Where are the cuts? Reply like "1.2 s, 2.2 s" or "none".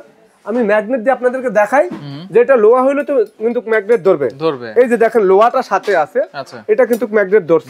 none